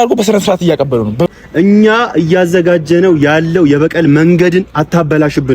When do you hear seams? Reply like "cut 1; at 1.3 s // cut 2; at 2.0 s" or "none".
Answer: cut 1; at 1.3 s